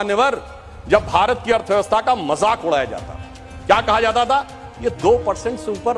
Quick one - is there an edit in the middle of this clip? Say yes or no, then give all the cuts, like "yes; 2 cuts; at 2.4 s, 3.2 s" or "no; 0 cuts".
no; 0 cuts